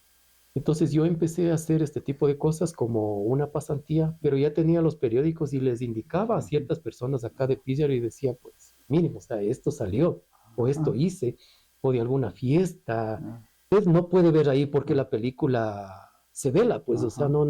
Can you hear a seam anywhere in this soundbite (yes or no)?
yes